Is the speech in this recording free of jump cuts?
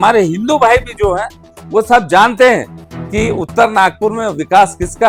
yes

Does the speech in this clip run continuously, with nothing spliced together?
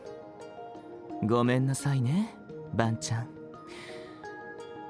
yes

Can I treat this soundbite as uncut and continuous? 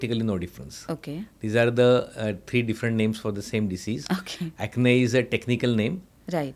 yes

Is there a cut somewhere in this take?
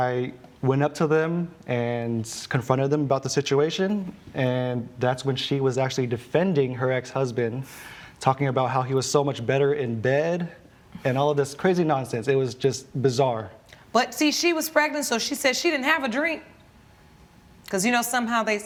no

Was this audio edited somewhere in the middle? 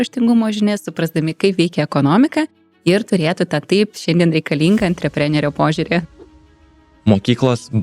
yes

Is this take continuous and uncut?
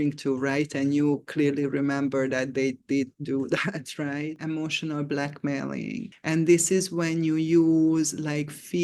no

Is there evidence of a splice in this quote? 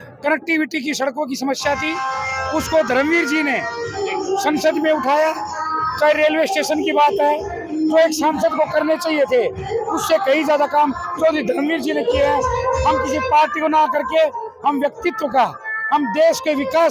no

